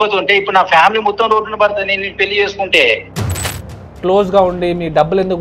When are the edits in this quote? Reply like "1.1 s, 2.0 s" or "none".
4.0 s